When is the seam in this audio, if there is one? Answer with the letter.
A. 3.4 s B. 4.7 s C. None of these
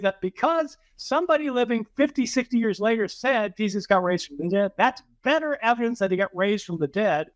B